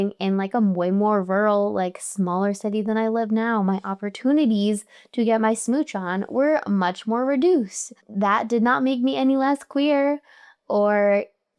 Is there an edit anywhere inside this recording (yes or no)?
no